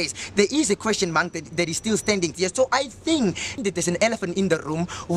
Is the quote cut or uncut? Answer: cut